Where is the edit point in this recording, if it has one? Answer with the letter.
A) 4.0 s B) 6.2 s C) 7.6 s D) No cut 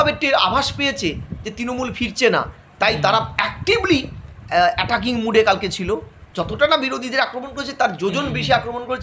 B